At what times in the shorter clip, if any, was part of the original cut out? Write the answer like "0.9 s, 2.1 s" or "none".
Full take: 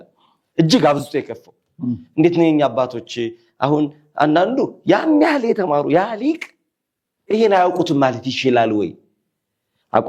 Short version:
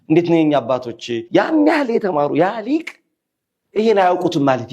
1.2 s